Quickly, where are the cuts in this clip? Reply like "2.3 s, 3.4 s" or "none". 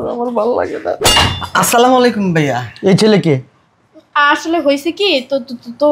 1.0 s